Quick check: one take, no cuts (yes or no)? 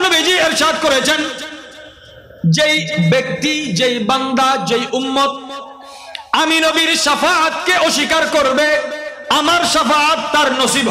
yes